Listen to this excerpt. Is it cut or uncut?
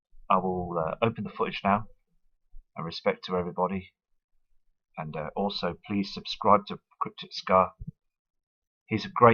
cut